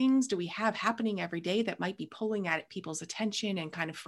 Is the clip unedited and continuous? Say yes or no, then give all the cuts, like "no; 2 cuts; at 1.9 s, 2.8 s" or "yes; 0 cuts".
yes; 0 cuts